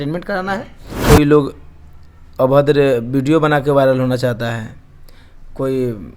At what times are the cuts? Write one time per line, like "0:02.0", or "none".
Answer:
0:01.0